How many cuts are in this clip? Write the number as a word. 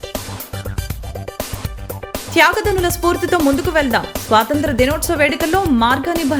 zero